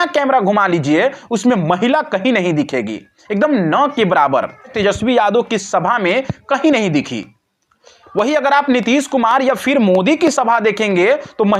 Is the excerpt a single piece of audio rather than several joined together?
no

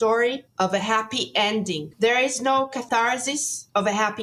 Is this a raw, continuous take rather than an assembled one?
no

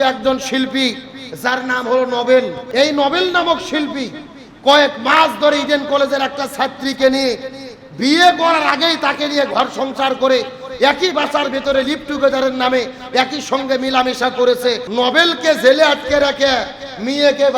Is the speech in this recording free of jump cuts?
no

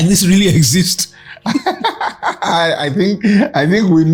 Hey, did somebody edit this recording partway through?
no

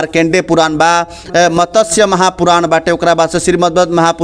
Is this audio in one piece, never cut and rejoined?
yes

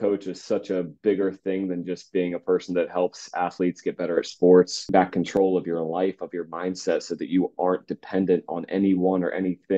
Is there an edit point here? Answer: yes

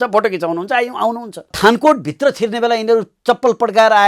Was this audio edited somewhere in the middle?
yes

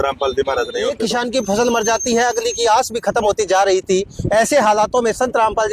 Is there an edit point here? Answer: yes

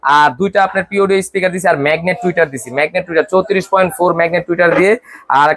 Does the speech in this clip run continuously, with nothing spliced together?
yes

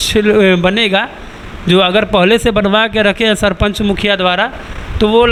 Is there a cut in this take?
no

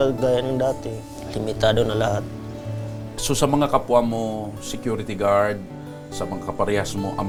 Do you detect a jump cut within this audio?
no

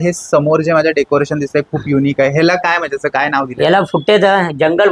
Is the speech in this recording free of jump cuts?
yes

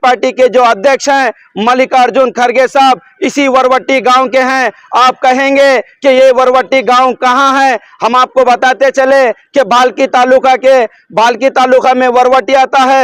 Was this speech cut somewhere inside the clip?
no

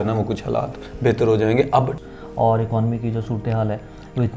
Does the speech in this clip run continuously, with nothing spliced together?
no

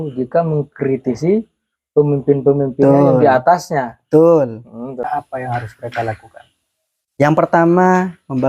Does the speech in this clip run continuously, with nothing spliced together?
no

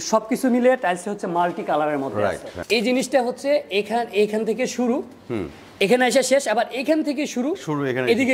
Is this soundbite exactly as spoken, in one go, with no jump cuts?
no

